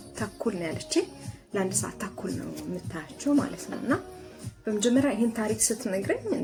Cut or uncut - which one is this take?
uncut